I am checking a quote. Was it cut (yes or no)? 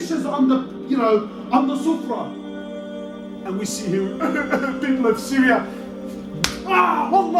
no